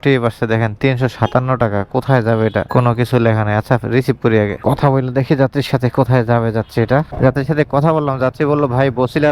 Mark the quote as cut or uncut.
uncut